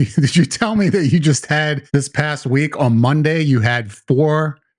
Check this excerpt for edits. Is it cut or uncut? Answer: cut